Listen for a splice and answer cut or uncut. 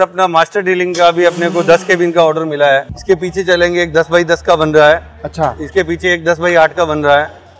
cut